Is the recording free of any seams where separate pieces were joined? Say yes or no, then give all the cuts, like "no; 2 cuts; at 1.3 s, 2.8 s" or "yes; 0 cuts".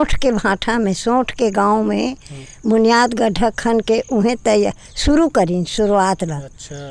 yes; 0 cuts